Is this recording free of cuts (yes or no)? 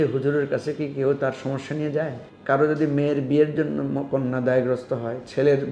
no